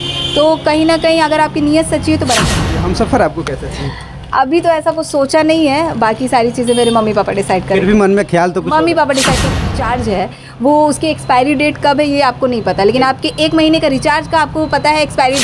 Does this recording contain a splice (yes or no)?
yes